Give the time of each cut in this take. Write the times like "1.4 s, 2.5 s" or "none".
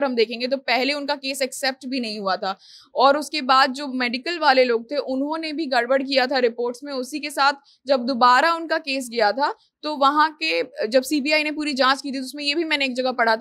none